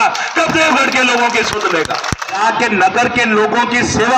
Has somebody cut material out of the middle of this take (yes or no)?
yes